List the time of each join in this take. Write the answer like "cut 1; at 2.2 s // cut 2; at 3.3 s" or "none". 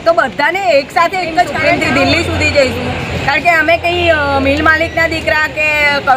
cut 1; at 1.7 s